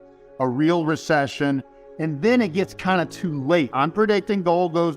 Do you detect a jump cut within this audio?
yes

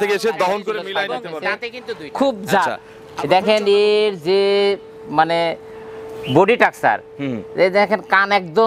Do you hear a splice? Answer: yes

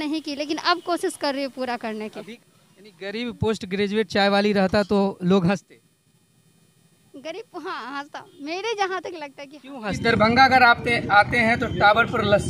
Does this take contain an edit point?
yes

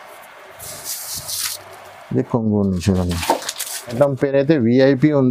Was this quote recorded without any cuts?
no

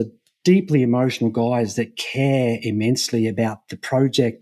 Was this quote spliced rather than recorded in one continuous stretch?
no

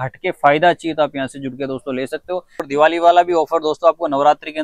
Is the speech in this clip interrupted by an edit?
yes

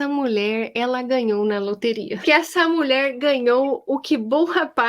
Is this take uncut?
no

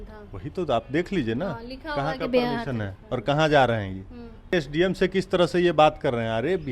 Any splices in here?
yes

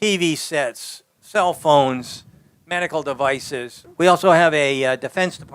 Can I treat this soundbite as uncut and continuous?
no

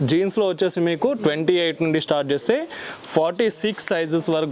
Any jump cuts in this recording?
no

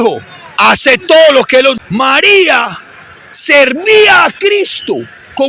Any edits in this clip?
yes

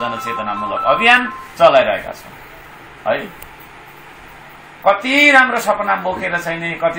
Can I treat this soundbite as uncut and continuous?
yes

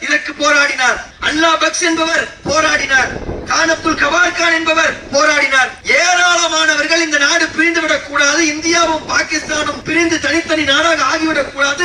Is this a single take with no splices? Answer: no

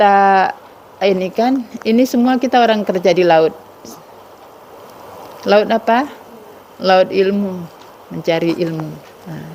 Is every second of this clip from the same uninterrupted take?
yes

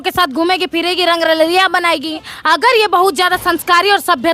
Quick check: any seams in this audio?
yes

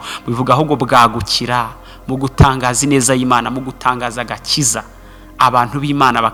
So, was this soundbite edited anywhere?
no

